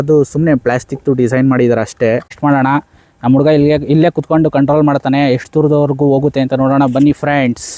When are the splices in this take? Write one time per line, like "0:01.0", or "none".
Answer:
0:02.4